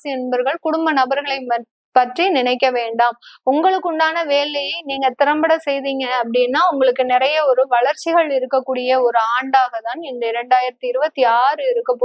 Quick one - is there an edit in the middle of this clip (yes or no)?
no